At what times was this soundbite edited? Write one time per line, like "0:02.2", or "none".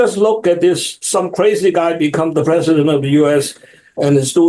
0:01.0